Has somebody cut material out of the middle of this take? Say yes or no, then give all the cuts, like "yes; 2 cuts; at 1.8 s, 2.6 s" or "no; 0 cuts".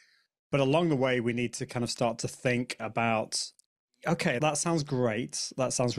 yes; 1 cut; at 4.4 s